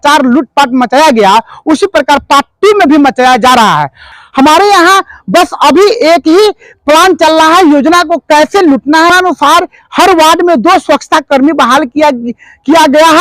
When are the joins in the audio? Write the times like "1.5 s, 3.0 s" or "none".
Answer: 4.0 s, 9.1 s